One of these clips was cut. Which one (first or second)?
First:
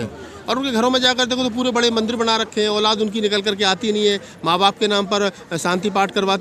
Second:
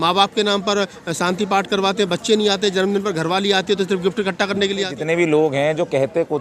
second